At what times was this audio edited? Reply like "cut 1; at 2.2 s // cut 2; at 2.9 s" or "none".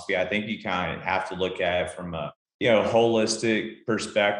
cut 1; at 2.4 s